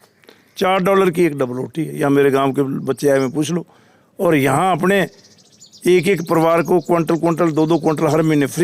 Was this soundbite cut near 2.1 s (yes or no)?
no